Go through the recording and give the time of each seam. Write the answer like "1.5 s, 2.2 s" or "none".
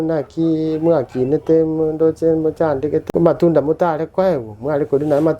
3.1 s